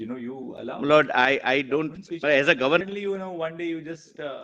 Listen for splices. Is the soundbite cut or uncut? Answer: cut